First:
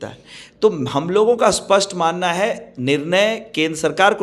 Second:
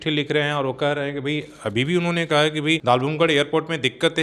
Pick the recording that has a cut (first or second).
second